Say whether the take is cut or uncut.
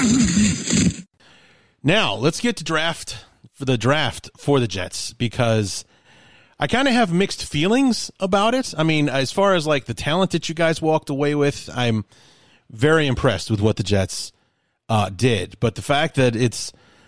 uncut